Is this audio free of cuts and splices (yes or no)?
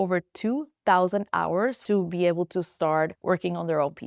no